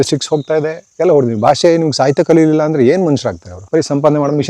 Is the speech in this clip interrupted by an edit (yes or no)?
yes